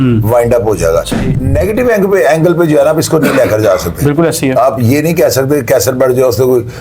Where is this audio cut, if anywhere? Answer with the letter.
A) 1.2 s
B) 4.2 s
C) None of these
A